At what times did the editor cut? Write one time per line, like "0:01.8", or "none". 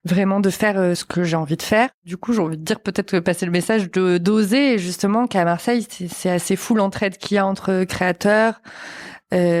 0:01.0
0:02.1